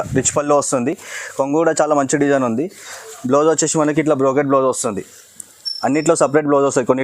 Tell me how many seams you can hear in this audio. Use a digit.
0